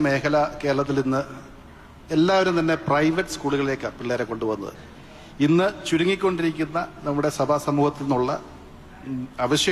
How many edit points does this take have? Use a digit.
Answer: 1